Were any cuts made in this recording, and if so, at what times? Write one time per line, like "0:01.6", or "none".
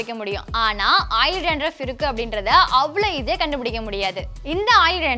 0:04.3